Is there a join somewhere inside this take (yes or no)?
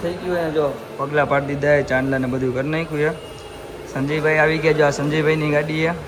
no